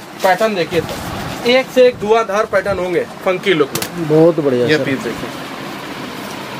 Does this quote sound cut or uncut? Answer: uncut